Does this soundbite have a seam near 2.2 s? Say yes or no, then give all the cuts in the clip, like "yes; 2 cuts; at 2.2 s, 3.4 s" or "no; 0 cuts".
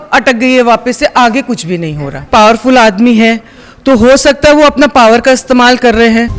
yes; 1 cut; at 2.2 s